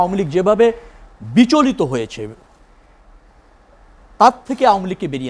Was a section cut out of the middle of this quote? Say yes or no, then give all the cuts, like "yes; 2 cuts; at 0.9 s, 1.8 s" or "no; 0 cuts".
no; 0 cuts